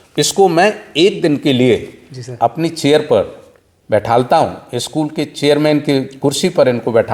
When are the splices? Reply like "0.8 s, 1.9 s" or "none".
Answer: none